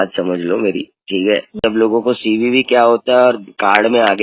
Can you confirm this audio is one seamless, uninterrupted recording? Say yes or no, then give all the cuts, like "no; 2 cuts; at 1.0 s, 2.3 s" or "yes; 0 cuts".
no; 1 cut; at 1.6 s